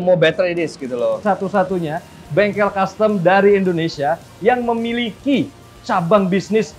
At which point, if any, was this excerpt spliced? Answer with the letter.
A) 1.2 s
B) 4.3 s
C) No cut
A